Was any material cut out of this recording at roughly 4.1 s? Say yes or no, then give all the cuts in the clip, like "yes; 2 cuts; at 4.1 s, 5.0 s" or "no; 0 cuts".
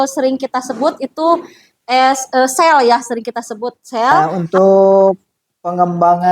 yes; 1 cut; at 4.1 s